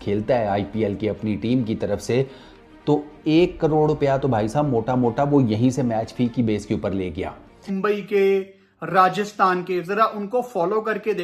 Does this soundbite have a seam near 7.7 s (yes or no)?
yes